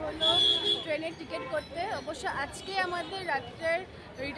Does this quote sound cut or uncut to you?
uncut